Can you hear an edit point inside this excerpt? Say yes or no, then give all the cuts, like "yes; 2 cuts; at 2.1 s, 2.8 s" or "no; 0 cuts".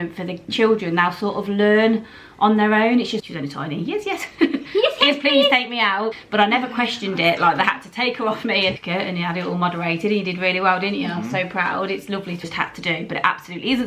yes; 4 cuts; at 3.2 s, 6.2 s, 8.8 s, 12.4 s